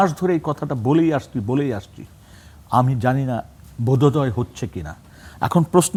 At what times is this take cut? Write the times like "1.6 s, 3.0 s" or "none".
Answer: none